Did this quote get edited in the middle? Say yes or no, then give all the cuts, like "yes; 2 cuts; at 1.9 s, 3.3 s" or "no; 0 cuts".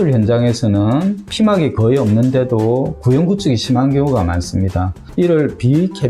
no; 0 cuts